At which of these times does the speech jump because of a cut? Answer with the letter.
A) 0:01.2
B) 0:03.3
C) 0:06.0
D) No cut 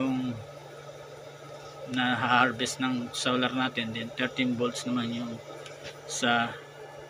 D